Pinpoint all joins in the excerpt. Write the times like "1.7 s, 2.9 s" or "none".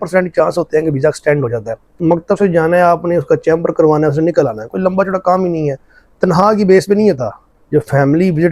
1.9 s